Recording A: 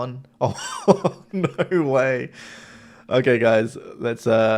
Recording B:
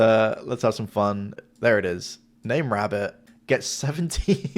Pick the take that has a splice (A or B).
B